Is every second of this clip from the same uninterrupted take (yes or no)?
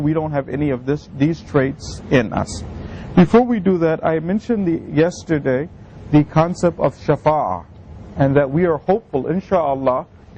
no